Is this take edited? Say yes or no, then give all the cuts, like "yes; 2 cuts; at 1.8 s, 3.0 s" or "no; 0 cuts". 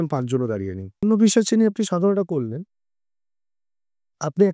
yes; 1 cut; at 1.0 s